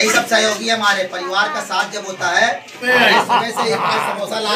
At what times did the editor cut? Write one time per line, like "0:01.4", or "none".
0:02.8